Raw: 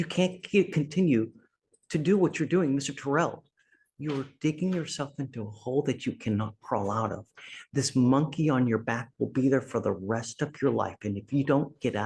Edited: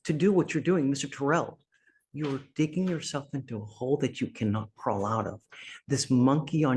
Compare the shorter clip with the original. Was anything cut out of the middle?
no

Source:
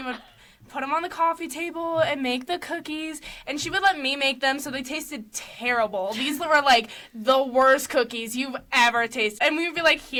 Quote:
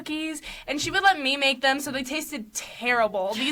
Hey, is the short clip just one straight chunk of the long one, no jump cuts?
yes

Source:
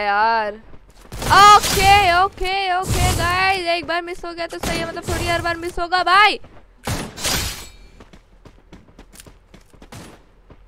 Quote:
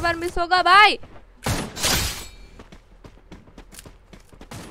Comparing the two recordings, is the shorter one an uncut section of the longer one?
yes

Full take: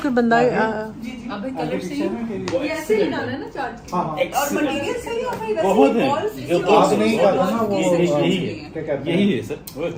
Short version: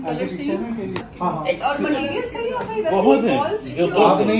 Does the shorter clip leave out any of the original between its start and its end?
yes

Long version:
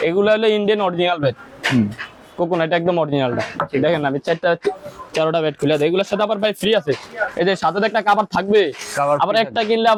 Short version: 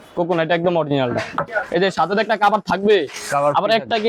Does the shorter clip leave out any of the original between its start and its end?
yes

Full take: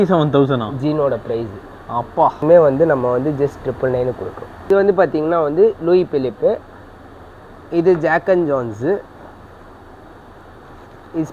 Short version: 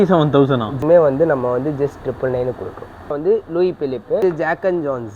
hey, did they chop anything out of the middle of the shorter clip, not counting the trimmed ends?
yes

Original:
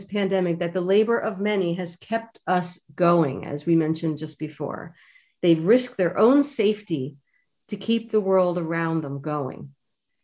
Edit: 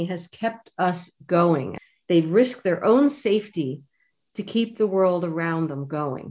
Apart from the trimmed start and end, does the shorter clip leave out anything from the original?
yes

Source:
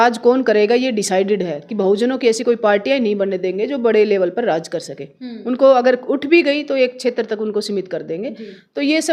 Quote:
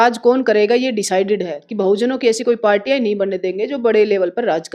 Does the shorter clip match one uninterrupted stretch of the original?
yes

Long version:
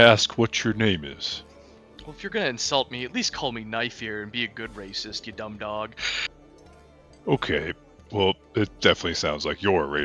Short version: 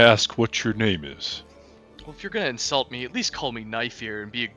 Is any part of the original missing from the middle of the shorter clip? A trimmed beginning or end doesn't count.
no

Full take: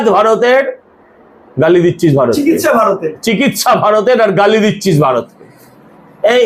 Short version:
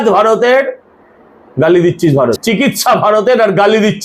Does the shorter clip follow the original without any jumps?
no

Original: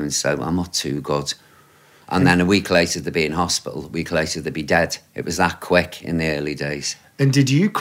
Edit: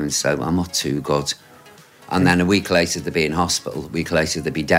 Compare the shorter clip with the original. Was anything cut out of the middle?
no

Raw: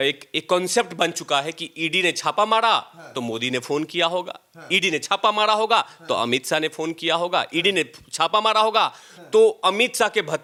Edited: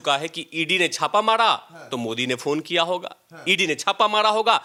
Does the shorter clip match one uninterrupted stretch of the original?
yes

